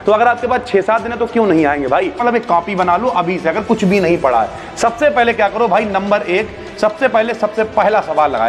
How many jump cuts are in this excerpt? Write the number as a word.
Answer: one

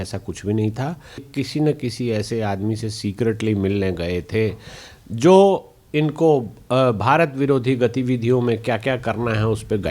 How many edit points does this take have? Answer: one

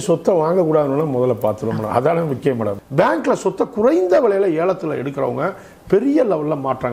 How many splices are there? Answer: one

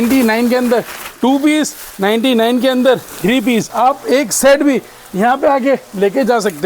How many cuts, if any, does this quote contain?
one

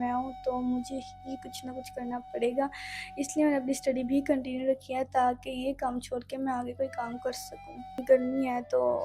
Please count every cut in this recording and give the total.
one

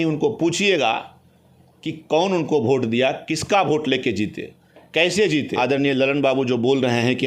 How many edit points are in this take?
one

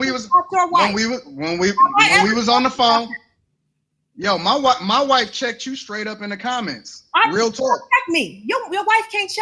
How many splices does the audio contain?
one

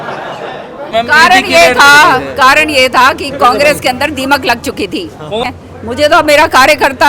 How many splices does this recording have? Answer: two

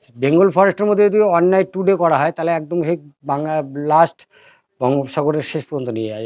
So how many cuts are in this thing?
zero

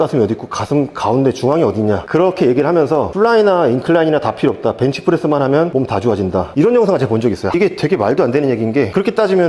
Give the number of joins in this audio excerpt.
one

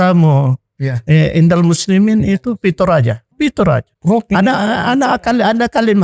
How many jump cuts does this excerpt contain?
two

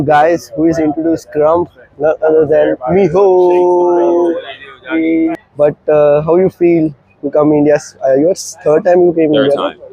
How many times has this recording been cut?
one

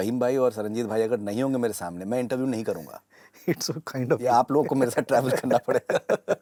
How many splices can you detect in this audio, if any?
zero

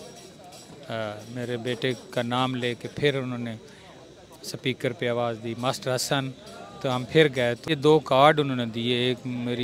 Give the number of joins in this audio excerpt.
one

